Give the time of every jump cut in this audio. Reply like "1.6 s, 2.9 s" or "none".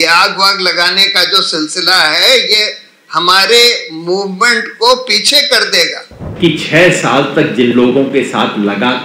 6.2 s

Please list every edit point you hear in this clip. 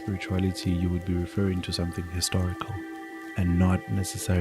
3.1 s

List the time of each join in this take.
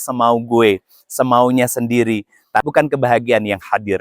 2.7 s

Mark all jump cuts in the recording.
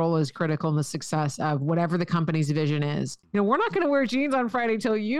3.2 s

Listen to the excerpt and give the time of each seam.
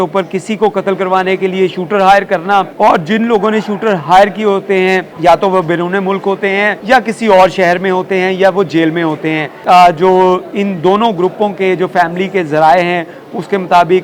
2.7 s, 5.1 s, 6.8 s, 9.5 s

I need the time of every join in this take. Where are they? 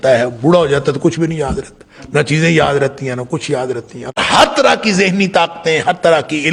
4.2 s

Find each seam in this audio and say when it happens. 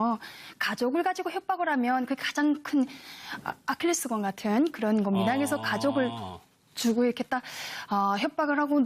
4.8 s

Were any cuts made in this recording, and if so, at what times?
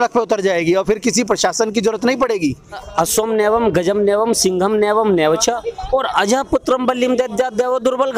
2.8 s

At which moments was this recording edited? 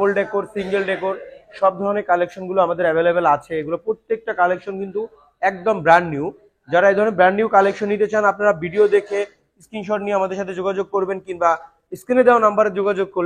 none

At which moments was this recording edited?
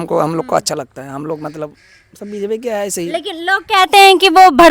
none

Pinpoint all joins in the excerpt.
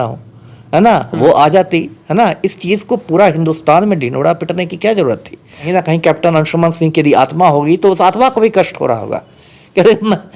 5.6 s

